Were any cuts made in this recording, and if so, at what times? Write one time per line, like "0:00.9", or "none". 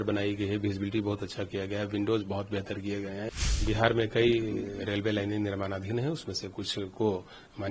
0:03.5